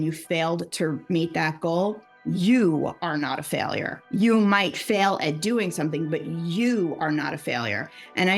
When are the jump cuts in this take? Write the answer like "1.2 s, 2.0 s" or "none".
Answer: 4.0 s